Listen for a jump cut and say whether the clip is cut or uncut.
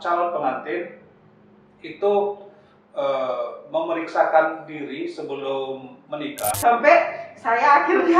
cut